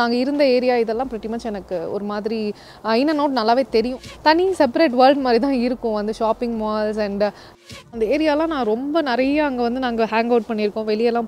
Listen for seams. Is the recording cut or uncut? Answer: cut